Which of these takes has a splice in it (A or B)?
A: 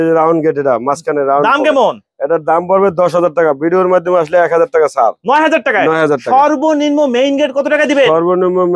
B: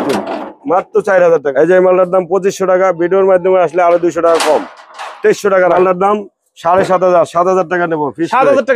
B